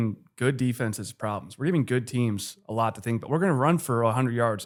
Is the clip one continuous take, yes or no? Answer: yes